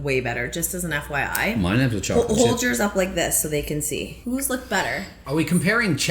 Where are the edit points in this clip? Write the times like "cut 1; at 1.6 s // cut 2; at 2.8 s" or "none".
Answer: cut 1; at 4.1 s